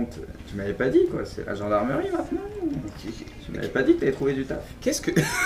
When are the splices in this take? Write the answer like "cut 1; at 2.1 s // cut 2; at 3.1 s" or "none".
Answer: none